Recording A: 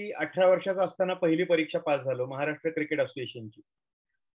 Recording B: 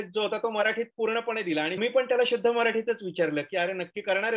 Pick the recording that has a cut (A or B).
B